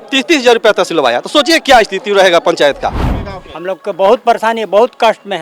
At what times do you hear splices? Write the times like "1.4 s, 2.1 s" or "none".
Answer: 3.0 s